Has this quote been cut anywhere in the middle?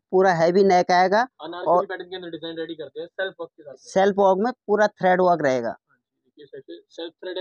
no; 0 cuts

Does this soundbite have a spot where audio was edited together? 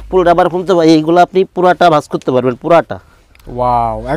no; 0 cuts

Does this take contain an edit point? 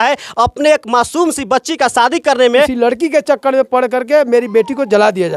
yes; 1 cut; at 2.7 s

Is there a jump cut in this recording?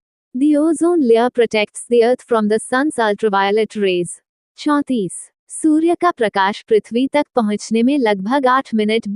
no; 0 cuts

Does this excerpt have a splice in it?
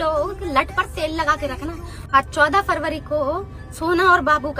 yes; 1 cut; at 2.1 s

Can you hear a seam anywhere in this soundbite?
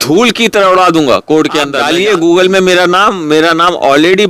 yes; 1 cut; at 1.8 s

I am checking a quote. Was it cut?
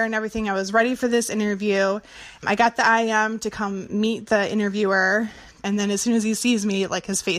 yes; 2 cuts; at 2.4 s, 5.6 s

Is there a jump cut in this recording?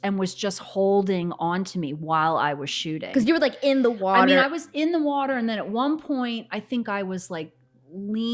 no; 0 cuts

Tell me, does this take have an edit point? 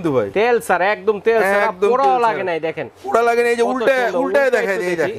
no; 0 cuts

